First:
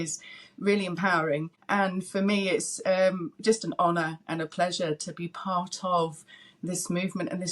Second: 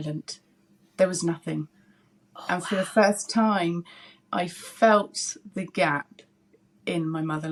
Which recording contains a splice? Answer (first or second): first